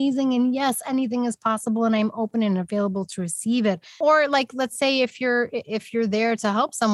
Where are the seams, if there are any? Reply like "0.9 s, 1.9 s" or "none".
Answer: 4.0 s